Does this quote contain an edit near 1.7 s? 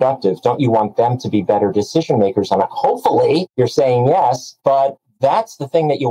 no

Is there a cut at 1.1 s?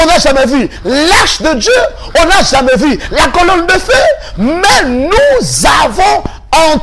no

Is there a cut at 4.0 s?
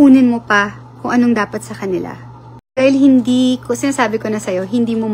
no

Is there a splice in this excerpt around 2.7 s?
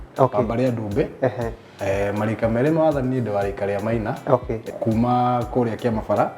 no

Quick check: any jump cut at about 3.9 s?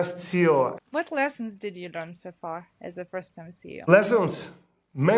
yes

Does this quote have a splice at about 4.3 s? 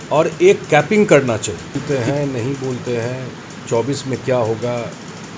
no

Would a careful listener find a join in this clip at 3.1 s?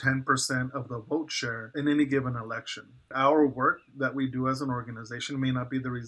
yes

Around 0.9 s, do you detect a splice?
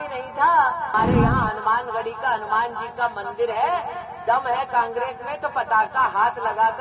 yes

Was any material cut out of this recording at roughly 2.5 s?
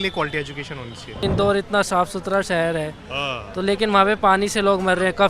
no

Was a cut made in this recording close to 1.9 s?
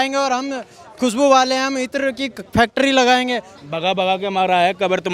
no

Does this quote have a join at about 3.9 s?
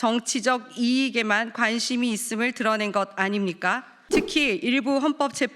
yes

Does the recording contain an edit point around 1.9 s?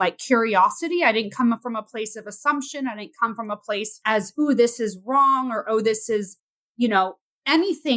no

